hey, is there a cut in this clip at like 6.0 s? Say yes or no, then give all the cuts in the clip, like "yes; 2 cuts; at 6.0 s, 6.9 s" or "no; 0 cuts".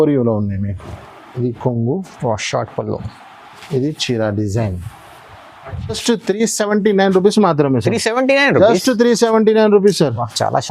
yes; 1 cut; at 6.0 s